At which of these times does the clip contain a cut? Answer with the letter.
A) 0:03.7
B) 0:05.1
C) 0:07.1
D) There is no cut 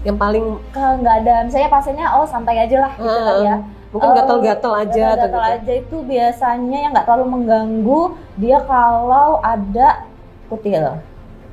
D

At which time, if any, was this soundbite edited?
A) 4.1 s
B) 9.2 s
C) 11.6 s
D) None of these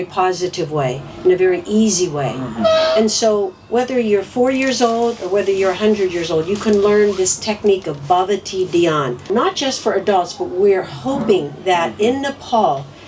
B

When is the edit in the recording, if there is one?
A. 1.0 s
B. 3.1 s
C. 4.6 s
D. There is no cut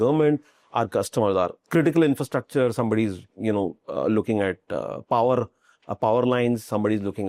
D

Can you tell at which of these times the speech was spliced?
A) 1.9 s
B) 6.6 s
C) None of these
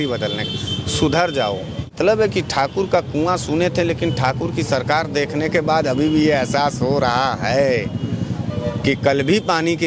A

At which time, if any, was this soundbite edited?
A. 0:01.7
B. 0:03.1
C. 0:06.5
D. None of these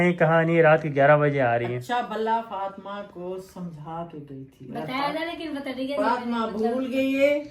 D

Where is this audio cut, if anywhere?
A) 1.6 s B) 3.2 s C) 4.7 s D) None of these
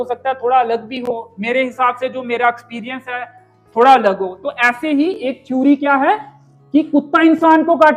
D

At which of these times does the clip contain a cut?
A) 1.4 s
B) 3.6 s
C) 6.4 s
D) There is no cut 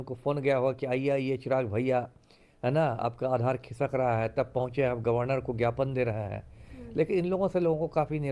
D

